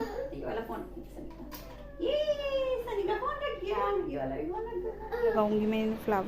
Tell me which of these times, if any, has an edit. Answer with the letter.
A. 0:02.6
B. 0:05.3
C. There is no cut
B